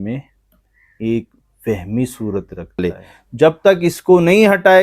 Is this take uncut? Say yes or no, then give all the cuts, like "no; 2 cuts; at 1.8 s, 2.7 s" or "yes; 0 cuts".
no; 1 cut; at 2.8 s